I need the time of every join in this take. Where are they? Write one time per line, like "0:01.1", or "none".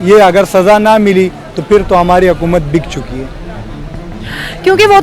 none

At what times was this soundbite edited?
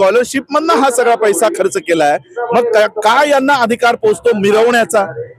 none

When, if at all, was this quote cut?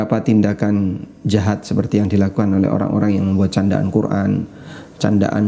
none

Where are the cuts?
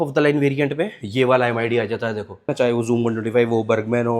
0:02.5

